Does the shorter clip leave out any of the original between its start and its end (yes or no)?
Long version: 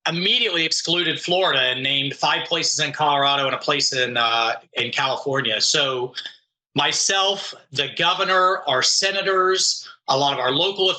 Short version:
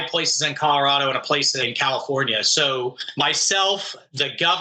yes